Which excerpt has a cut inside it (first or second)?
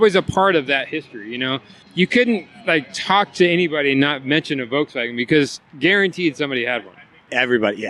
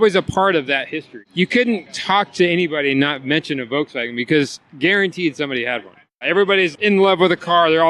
second